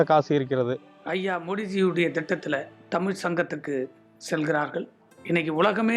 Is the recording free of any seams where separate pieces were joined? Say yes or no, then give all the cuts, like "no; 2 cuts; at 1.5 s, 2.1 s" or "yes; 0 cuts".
no; 1 cut; at 0.9 s